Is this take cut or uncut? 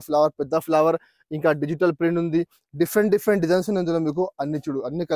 uncut